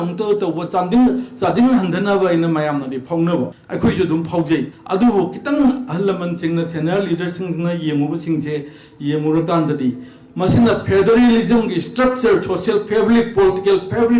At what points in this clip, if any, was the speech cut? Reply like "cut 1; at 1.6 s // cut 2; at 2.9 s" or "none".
cut 1; at 3.6 s // cut 2; at 4.8 s